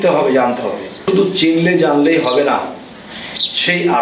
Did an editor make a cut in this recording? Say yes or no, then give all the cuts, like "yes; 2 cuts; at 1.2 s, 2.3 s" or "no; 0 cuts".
yes; 1 cut; at 1.0 s